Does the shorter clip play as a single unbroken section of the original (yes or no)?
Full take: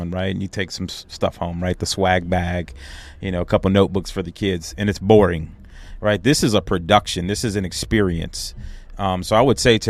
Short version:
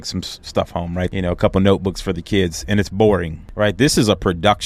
no